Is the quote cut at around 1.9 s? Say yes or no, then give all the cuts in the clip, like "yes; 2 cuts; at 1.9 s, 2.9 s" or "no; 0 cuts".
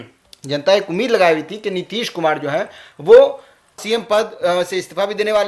no; 1 cut; at 3.8 s